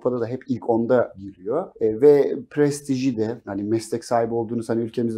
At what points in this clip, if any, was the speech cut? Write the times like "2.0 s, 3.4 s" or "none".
1.4 s, 3.4 s